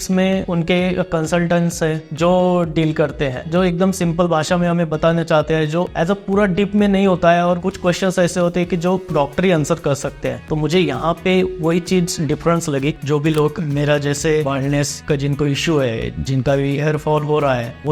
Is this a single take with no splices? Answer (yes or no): no